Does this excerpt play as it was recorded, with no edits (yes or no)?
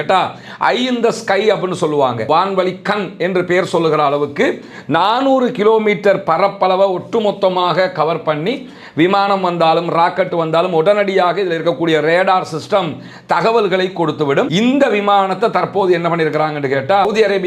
no